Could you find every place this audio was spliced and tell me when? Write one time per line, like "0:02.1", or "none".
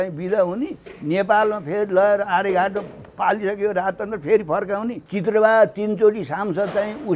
0:05.0